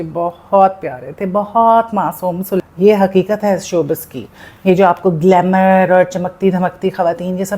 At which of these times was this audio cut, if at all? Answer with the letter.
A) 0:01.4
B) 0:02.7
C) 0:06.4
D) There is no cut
B